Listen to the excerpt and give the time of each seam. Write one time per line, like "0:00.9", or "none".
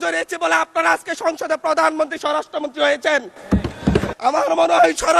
0:04.1

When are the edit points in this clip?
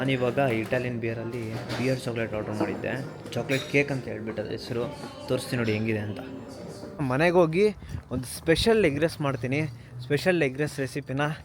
0:07.0

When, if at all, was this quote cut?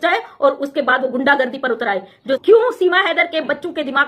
0:02.4

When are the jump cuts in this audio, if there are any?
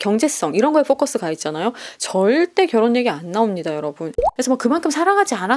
0:04.2

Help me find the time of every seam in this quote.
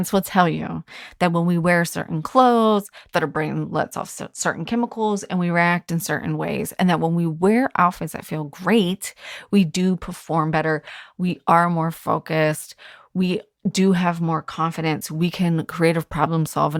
none

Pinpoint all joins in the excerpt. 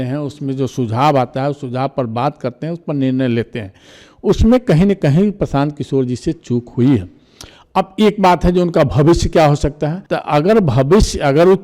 none

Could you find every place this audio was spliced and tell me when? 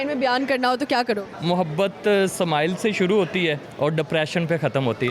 0:01.3
0:03.7

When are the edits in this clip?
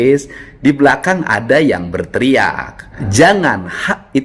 0:03.0

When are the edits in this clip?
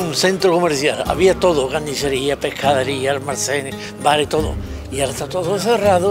none

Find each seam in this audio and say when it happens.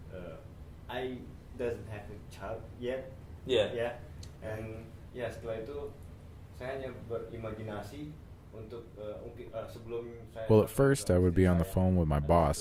none

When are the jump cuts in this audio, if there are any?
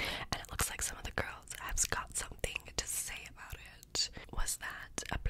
0:04.2

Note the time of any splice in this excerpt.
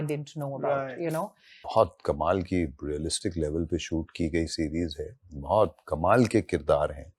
0:01.6

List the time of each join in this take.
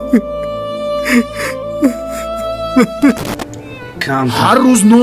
0:03.3

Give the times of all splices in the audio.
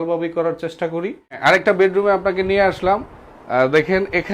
0:01.4

